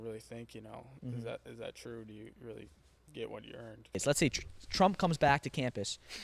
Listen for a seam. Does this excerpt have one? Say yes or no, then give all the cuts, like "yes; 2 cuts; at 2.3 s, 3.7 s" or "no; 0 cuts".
yes; 1 cut; at 4.0 s